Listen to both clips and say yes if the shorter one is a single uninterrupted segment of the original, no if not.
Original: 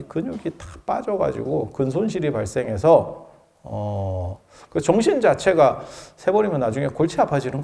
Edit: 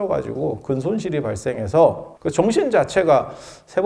no